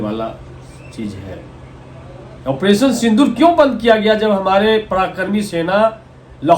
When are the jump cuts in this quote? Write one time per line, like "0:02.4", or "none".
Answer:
none